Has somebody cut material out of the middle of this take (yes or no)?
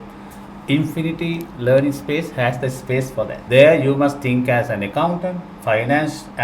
yes